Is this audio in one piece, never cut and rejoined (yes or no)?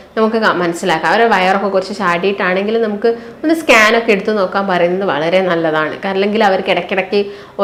yes